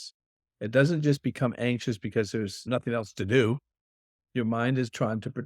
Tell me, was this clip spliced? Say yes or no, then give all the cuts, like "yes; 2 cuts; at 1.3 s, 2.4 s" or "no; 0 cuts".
yes; 1 cut; at 2.6 s